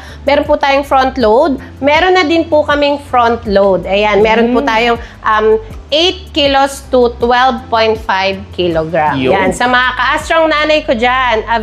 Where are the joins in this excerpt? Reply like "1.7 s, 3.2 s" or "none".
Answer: none